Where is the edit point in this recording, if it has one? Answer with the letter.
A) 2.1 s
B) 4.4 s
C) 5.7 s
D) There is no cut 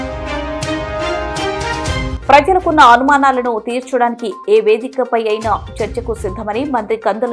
A